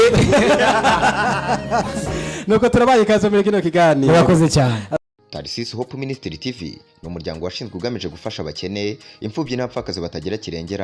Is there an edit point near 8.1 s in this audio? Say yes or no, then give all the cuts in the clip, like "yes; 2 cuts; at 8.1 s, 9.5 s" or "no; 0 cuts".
no; 1 cut; at 5.0 s